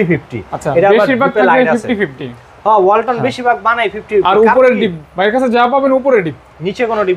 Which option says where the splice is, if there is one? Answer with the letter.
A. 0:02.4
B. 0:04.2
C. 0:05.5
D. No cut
D